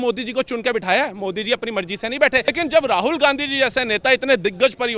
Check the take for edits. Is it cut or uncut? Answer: cut